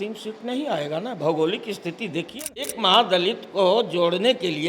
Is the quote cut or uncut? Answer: cut